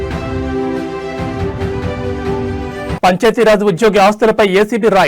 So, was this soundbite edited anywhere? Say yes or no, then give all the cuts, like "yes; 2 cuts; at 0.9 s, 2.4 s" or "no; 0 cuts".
yes; 1 cut; at 3.0 s